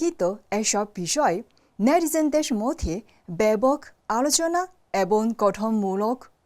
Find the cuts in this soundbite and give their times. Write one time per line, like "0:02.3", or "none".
none